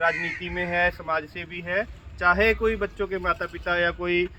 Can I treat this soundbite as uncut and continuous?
yes; 0 cuts

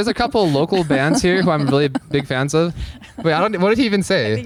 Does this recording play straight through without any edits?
yes; 0 cuts

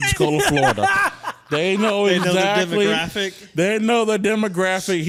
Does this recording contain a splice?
no; 0 cuts

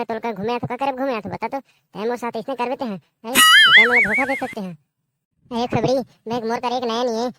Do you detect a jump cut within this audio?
no; 0 cuts

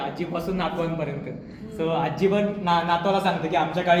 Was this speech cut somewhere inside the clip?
no; 0 cuts

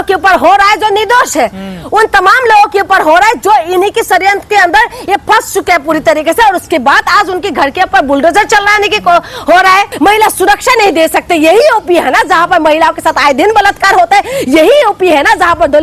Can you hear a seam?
yes; 1 cut; at 9.9 s

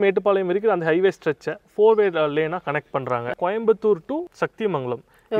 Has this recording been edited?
yes; 2 cuts; at 3.3 s, 4.3 s

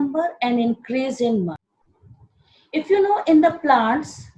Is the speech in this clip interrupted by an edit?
yes; 1 cut; at 1.6 s

